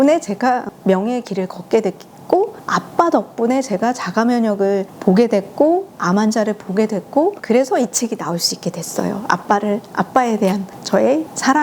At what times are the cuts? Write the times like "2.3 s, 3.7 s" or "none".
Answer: none